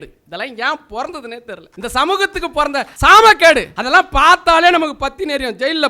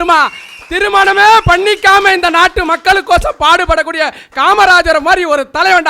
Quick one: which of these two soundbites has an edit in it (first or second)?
first